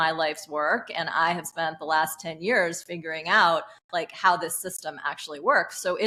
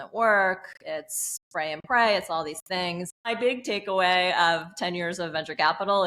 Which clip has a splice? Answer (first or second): second